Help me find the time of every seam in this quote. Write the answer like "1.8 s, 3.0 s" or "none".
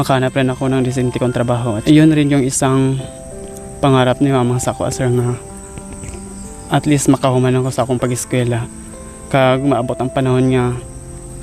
1.8 s

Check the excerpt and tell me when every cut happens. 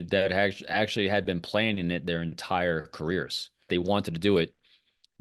3.7 s

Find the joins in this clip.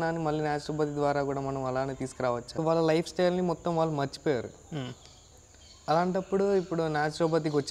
2.6 s

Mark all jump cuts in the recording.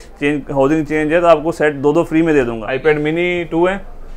2.6 s

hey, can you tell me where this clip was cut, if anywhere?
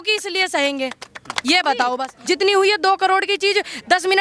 2.1 s

